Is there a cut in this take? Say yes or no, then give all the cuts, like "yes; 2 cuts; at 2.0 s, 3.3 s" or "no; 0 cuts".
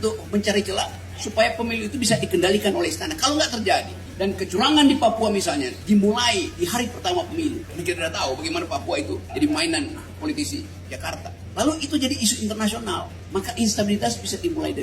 yes; 5 cuts; at 4.0 s, 7.7 s, 9.3 s, 11.4 s, 13.1 s